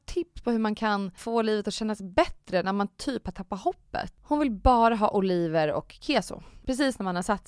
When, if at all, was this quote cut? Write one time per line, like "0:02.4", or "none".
0:01.2
0:04.1
0:06.5